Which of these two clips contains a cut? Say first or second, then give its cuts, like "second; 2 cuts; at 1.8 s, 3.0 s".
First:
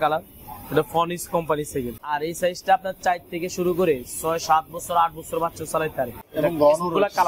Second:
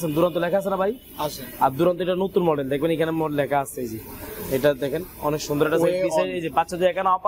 first; 2 cuts; at 2.0 s, 6.2 s